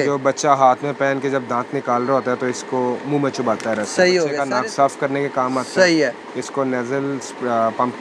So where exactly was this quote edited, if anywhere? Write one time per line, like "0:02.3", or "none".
0:04.4